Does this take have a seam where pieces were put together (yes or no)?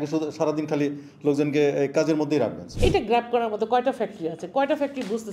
yes